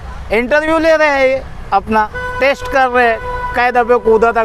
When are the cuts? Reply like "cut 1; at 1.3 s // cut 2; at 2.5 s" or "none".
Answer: none

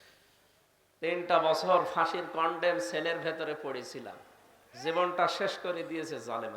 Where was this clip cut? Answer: cut 1; at 1.0 s

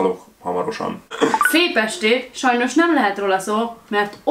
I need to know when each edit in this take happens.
cut 1; at 1.1 s

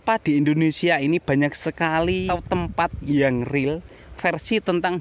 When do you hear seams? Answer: cut 1; at 2.3 s

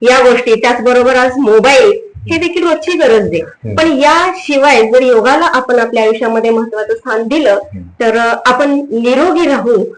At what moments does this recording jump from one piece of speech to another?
none

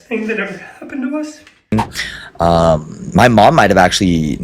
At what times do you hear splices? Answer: cut 1; at 1.7 s

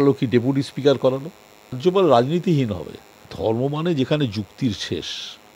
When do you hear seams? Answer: cut 1; at 1.8 s // cut 2; at 3.3 s

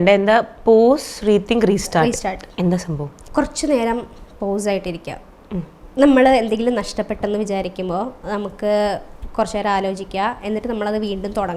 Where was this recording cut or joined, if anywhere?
cut 1; at 3.1 s

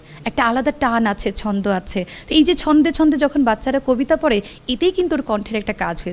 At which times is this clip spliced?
none

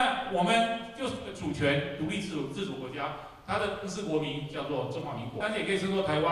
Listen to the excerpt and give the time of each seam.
cut 1; at 5.4 s

